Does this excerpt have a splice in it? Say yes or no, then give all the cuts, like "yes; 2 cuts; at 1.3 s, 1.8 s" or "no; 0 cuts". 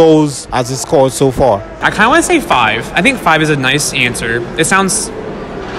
yes; 1 cut; at 1.8 s